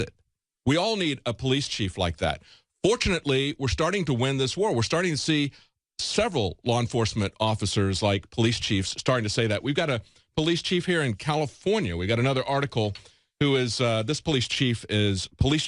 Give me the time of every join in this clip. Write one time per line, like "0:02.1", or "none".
0:14.4